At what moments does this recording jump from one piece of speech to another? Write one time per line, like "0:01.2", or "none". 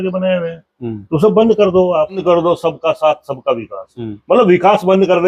0:02.2